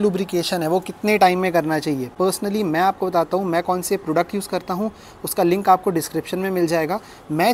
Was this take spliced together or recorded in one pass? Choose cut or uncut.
uncut